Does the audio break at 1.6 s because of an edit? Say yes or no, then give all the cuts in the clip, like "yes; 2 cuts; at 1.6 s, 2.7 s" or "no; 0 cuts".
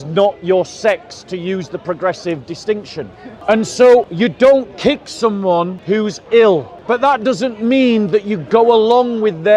no; 4 cuts; at 3.2 s, 4.1 s, 5.8 s, 6.7 s